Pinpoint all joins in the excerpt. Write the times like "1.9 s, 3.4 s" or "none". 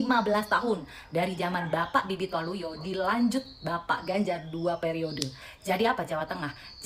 none

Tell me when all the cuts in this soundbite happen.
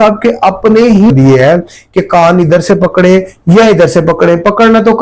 1.1 s

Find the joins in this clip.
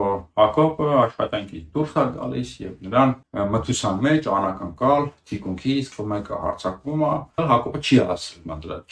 3.2 s, 5.9 s, 7.4 s

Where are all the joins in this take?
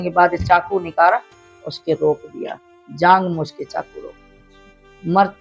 none

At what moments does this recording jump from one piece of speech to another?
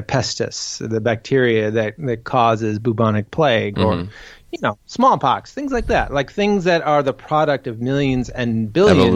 none

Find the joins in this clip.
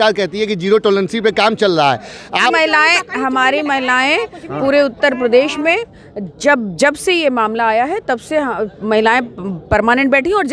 2.5 s

